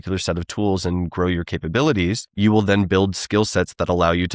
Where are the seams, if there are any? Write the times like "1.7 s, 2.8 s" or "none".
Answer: 2.2 s